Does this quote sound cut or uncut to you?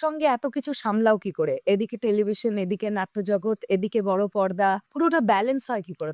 uncut